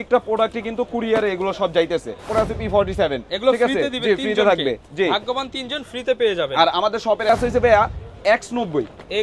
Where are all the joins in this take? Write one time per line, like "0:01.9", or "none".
0:02.3
0:07.3

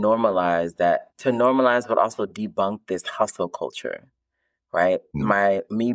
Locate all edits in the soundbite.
0:01.1
0:05.1

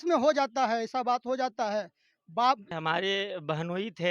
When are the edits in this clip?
0:02.7

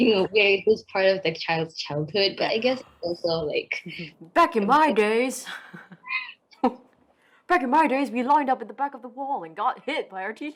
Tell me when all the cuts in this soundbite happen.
none

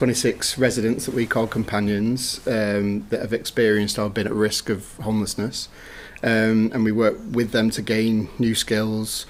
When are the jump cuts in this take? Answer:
none

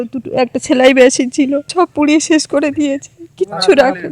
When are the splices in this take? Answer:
0:01.7

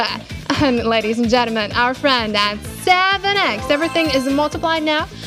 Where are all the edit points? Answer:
none

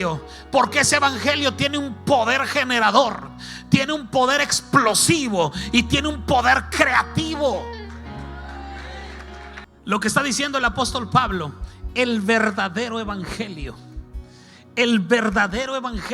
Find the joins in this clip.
0:09.6

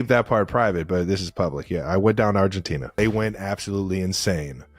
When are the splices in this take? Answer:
0:02.8

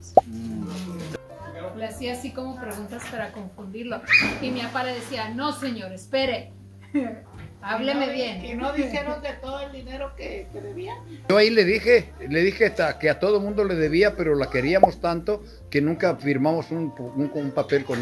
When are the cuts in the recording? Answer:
0:01.1
0:11.3

